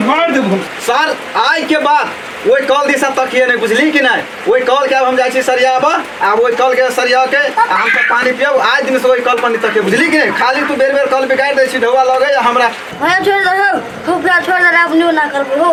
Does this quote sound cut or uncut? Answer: uncut